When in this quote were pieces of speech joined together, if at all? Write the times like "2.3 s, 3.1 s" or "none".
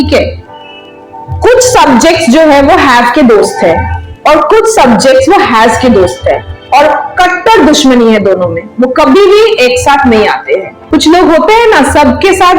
10.8 s